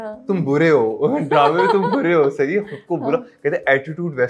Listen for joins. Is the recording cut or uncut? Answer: uncut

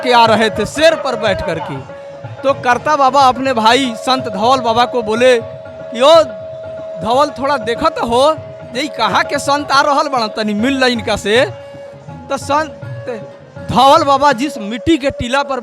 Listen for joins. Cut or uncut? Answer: uncut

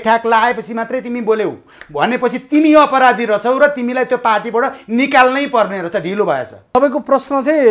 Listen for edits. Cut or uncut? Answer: cut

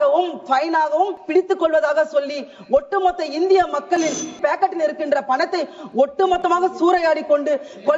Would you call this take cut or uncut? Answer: cut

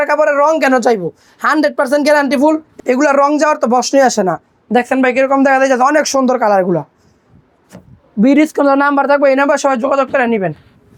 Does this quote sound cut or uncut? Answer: uncut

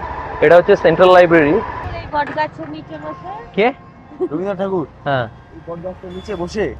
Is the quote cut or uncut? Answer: cut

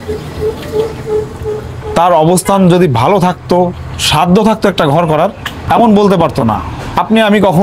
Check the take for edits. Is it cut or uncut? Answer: cut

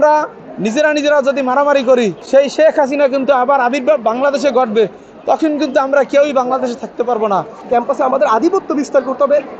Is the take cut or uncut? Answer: cut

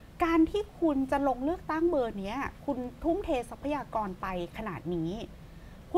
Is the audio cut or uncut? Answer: uncut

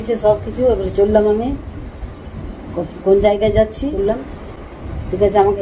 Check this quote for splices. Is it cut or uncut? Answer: cut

